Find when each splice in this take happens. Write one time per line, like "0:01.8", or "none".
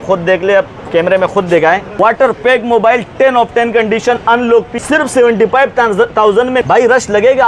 0:01.9
0:04.8
0:06.6